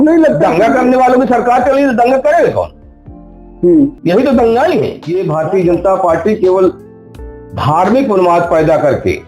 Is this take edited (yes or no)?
yes